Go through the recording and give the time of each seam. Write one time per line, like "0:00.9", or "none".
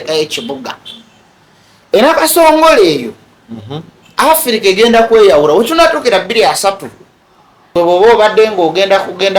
0:07.7